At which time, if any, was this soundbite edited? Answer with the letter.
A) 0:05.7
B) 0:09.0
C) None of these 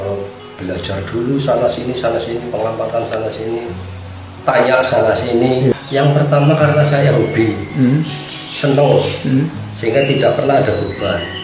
A